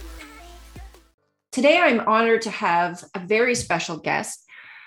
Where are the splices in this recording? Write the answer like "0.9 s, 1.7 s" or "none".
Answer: 1.3 s